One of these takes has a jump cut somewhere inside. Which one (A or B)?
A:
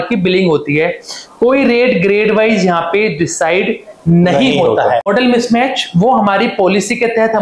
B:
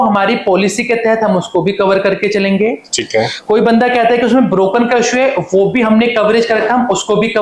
A